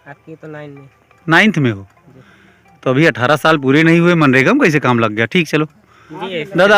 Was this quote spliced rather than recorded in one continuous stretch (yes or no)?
no